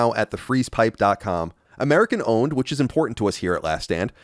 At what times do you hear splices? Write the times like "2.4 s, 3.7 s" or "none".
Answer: 1.6 s